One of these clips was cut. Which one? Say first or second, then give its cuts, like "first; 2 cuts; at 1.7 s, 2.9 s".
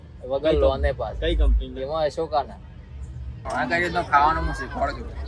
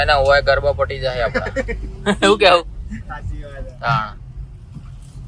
first; 1 cut; at 3.3 s